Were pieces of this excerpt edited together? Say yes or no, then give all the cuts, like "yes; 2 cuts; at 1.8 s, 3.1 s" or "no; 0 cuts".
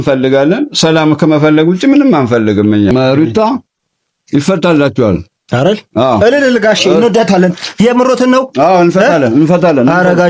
yes; 1 cut; at 2.9 s